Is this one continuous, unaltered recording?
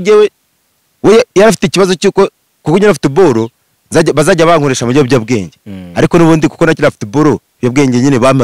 yes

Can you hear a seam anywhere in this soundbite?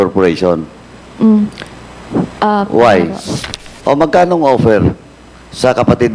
yes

